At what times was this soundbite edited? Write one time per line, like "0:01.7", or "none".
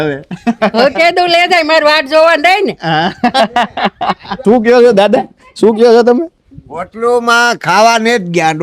0:04.5